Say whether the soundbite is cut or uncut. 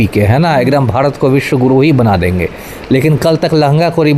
uncut